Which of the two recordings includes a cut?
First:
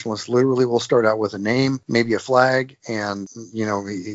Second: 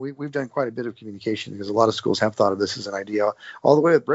first; 2 cuts; at 1.8 s, 3.1 s

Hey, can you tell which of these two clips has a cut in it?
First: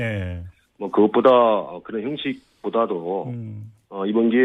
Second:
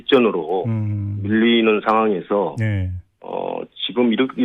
first; 1 cut; at 1.3 s

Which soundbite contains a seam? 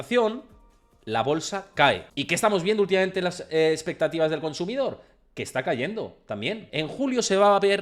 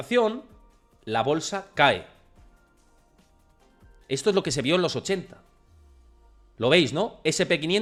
first; 2 cuts; at 2.1 s, 6.6 s

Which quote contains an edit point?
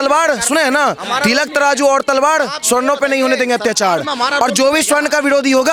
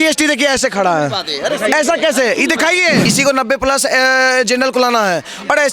second; 1 cut; at 3.1 s

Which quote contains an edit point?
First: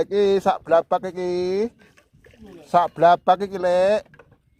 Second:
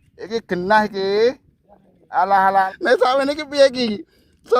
second; 1 cut; at 2.7 s

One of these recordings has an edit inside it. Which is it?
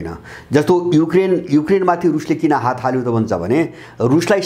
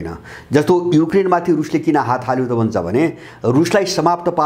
second; 1 cut; at 1.1 s

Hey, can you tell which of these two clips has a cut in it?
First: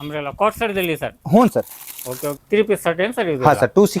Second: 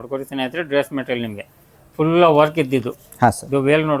first; 1 cut; at 2.3 s

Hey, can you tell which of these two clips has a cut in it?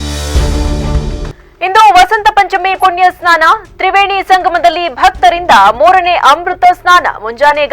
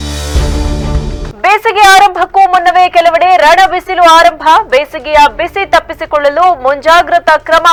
first; 1 cut; at 1.3 s

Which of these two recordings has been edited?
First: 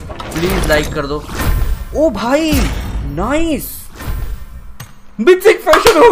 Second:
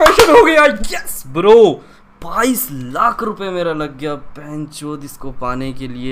first; 1 cut; at 3.8 s

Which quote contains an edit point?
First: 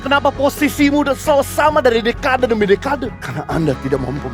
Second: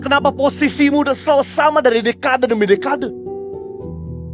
first; 1 cut; at 3.2 s

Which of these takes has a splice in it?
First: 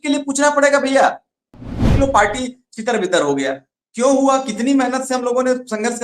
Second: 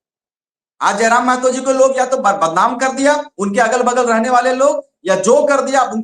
first; 1 cut; at 1.9 s

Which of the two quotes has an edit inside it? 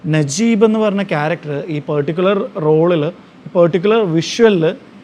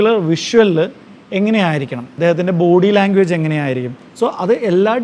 second; 2 cuts; at 2.1 s, 4.0 s

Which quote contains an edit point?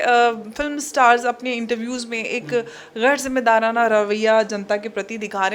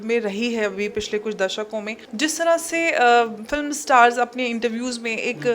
second; 1 cut; at 2.0 s

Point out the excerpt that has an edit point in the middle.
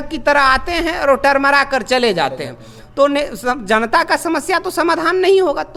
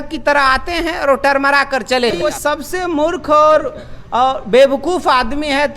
second; 1 cut; at 2.1 s

